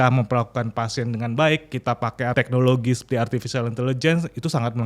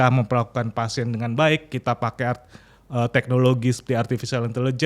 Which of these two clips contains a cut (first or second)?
first